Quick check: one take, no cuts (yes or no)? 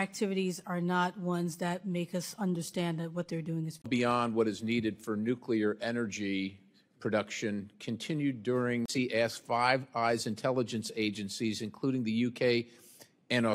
yes